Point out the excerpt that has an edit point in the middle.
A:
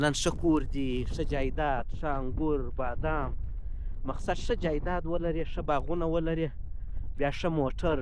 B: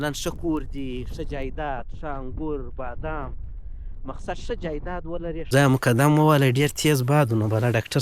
B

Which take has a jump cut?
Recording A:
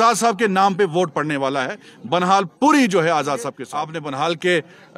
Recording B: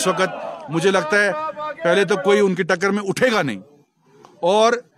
A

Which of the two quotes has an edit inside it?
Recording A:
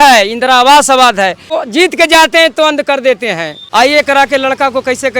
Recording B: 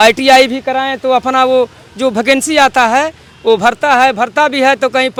A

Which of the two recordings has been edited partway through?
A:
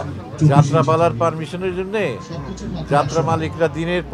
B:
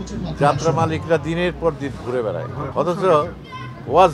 B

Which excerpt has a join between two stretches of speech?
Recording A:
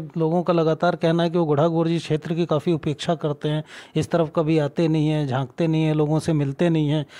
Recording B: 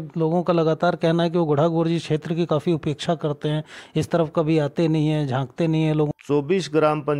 B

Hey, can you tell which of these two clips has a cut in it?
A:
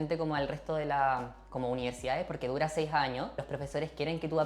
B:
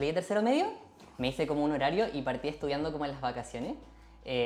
A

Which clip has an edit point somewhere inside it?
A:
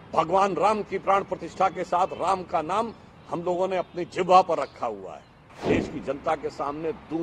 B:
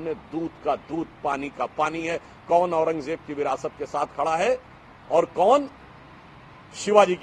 A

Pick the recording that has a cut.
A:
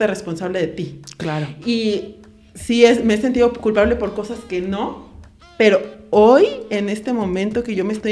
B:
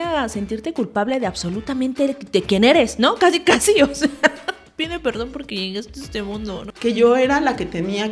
B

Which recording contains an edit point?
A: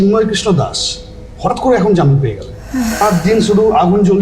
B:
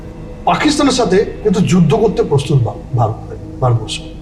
A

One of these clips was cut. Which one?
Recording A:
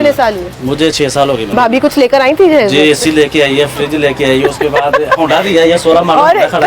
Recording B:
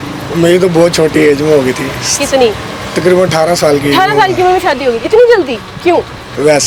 A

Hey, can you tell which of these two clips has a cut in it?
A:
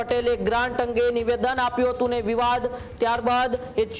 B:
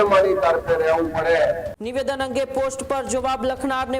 B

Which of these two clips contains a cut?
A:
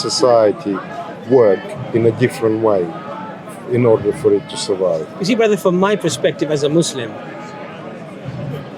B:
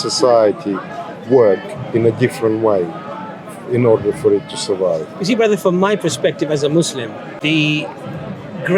B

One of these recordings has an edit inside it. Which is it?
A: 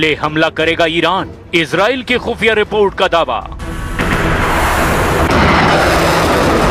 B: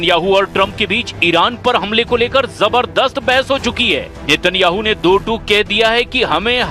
B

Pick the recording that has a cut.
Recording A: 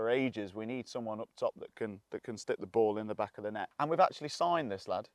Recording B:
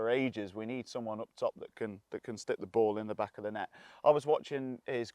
A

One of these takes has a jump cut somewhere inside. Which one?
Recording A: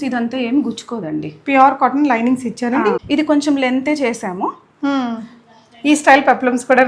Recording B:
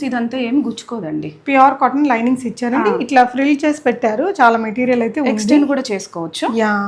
A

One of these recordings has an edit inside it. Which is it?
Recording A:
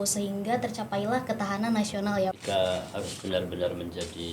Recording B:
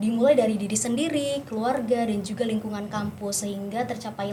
A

